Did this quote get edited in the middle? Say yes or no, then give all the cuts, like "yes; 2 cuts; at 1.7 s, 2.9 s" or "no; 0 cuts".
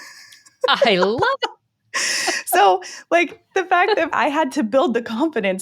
yes; 1 cut; at 4.1 s